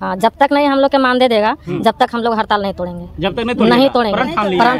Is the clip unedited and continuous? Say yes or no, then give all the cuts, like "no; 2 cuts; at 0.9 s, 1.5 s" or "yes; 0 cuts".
yes; 0 cuts